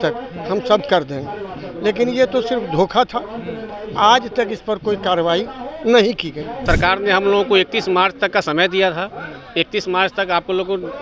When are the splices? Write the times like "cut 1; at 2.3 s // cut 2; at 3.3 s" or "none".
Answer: cut 1; at 6.6 s

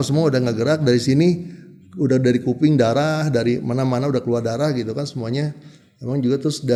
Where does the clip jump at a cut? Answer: none

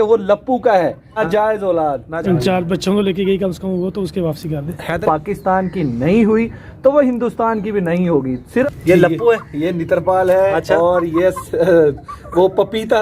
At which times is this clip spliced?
cut 1; at 1.1 s // cut 2; at 2.1 s // cut 3; at 5.0 s // cut 4; at 8.4 s

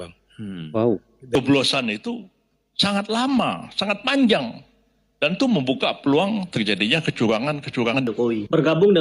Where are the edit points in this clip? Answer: cut 1; at 1.4 s // cut 2; at 7.9 s

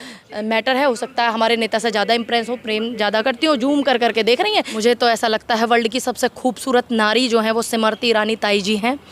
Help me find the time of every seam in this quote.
cut 1; at 4.7 s

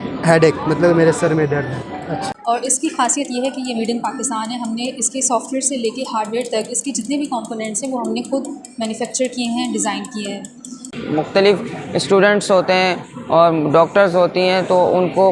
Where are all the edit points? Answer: cut 1; at 2.3 s // cut 2; at 10.9 s

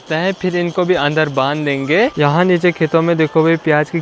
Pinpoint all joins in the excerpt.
cut 1; at 2.2 s

